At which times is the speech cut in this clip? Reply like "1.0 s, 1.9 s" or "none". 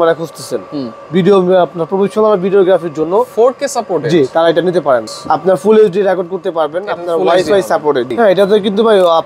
5.1 s, 8.1 s